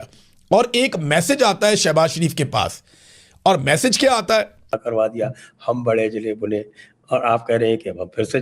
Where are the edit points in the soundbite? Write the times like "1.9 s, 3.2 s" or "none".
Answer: 4.8 s